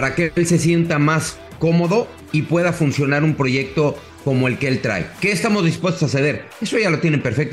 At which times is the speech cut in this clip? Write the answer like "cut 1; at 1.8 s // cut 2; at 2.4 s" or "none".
cut 1; at 2.2 s // cut 2; at 4.1 s